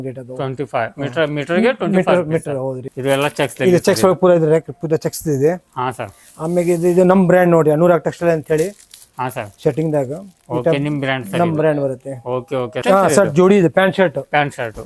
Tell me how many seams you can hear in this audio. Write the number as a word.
two